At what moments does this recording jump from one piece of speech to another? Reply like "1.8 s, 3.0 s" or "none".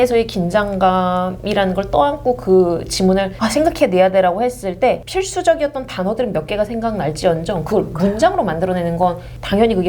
3.3 s, 5.0 s

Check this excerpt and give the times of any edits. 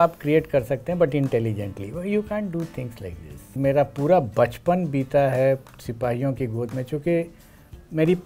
3.6 s

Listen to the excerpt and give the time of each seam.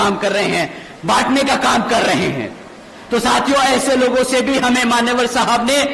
none

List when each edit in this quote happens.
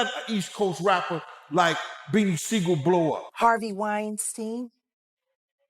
3.3 s

